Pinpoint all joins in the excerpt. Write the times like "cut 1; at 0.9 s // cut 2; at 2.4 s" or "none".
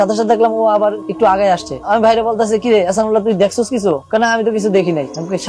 none